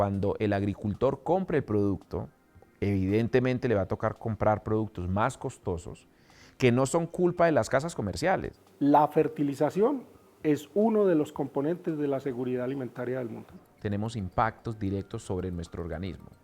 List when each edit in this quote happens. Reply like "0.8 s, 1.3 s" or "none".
8.6 s, 13.7 s